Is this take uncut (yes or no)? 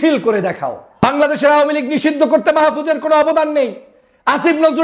no